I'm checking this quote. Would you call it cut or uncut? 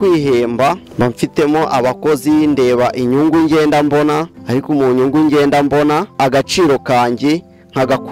cut